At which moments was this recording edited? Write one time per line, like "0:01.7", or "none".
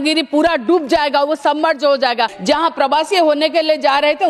0:02.4